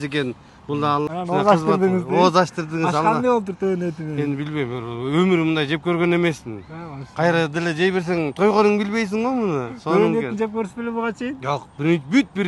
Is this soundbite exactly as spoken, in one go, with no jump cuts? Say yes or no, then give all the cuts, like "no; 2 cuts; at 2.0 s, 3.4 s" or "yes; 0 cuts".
no; 1 cut; at 1.1 s